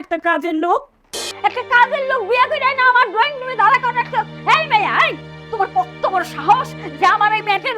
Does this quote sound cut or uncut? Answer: cut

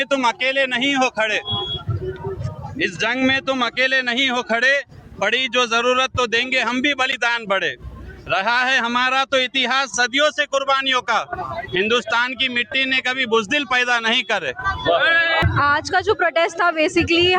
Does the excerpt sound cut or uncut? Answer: uncut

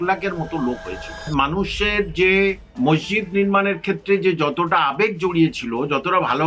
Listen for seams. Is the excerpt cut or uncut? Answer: cut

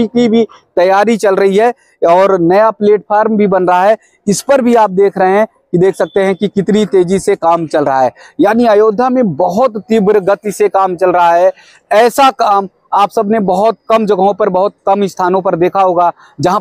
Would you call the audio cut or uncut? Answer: uncut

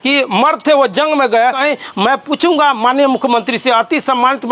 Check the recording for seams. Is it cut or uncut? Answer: cut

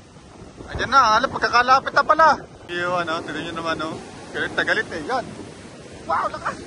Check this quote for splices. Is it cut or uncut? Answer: cut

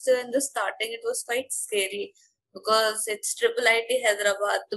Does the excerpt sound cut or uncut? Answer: uncut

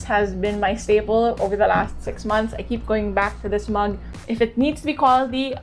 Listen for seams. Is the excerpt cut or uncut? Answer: cut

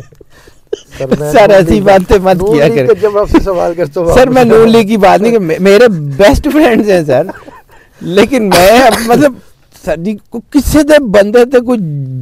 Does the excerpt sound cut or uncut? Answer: uncut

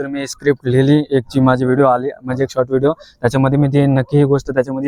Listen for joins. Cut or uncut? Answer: uncut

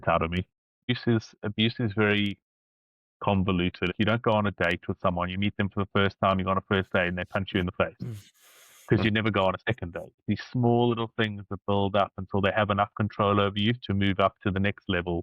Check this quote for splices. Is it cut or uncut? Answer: cut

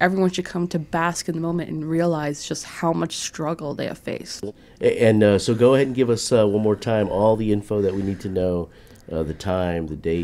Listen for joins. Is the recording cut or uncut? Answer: uncut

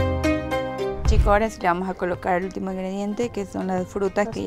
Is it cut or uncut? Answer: cut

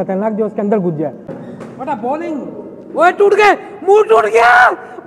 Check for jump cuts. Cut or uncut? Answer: cut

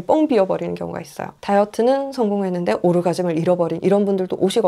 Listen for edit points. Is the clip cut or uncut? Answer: uncut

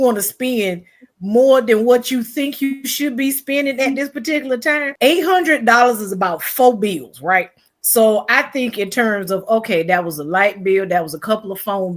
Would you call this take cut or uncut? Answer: cut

